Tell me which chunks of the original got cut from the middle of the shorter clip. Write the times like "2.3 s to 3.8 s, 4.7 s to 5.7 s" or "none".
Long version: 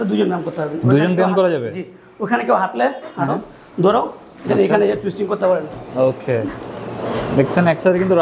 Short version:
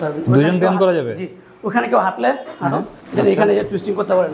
3.5 s to 4.3 s